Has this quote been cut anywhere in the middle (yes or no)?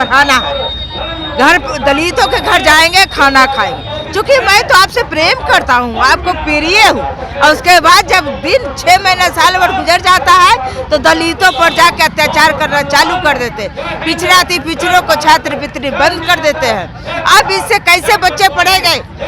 no